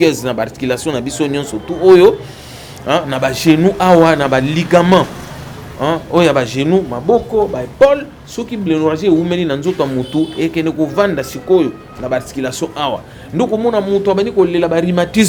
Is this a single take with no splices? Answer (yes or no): yes